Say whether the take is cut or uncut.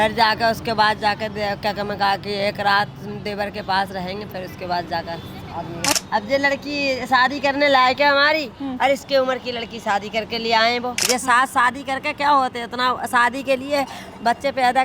cut